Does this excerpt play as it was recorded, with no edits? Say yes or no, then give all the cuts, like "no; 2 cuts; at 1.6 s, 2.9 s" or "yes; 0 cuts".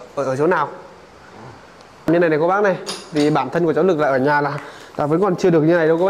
no; 1 cut; at 2.1 s